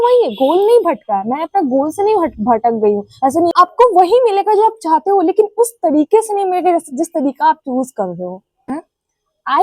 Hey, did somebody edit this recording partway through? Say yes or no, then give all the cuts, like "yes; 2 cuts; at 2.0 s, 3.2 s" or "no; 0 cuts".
yes; 2 cuts; at 3.5 s, 8.6 s